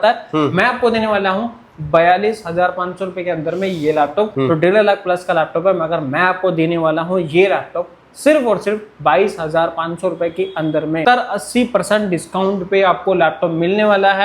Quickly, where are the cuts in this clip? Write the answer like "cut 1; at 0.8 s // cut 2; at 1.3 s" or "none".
cut 1; at 4.3 s // cut 2; at 11.0 s